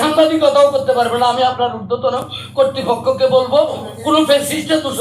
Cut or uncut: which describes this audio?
cut